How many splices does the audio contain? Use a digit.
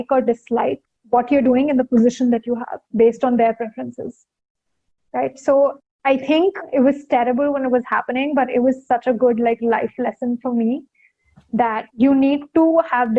3